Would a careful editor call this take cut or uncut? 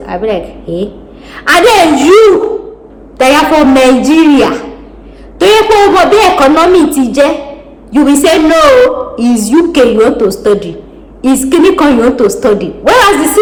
uncut